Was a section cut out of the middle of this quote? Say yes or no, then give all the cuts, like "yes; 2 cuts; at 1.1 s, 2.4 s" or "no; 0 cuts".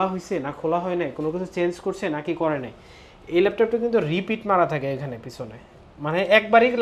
no; 0 cuts